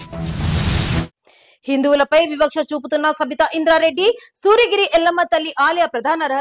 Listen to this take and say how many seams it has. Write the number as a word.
one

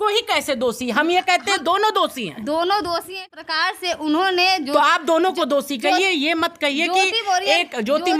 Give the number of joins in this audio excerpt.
one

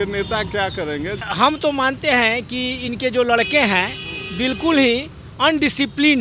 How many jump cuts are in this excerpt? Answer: one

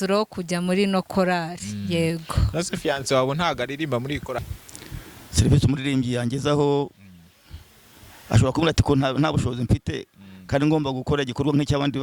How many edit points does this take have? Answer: one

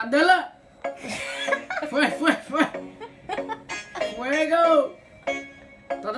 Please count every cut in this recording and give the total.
zero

